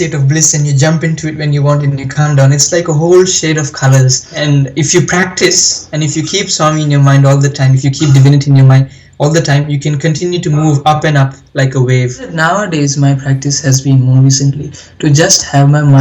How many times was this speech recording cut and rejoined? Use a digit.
2